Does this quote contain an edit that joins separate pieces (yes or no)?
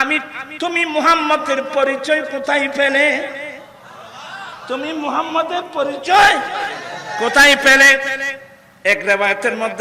no